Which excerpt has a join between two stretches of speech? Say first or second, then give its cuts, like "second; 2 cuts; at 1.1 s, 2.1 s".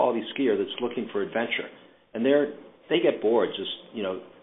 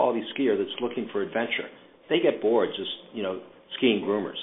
second; 1 cut; at 1.9 s